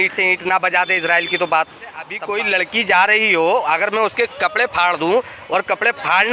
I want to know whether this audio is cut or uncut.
cut